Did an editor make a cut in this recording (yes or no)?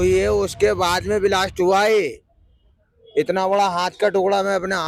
no